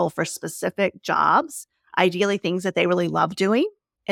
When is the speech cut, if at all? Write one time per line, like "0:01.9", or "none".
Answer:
none

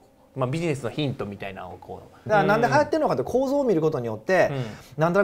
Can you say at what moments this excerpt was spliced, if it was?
0:02.1

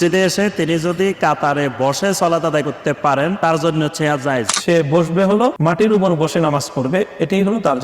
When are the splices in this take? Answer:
0:03.4
0:04.5
0:05.6

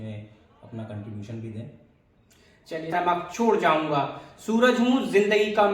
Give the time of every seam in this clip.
0:02.9

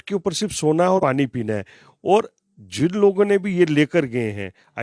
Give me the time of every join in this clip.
0:01.0

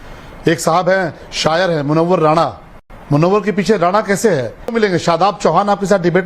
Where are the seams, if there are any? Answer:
0:04.7

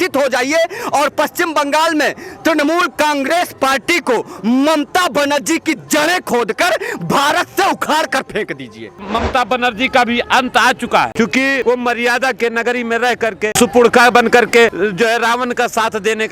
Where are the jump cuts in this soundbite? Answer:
0:09.0
0:11.5
0:13.4
0:14.7

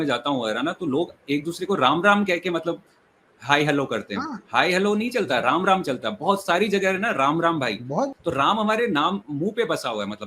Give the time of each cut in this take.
0:08.1

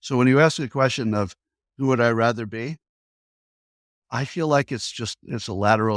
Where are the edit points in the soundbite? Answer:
none

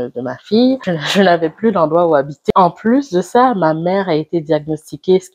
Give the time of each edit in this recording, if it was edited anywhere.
0:00.9
0:02.5

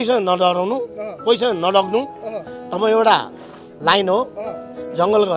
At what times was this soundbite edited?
none

